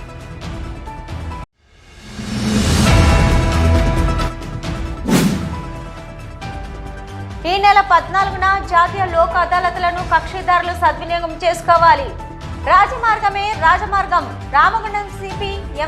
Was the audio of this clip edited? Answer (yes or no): yes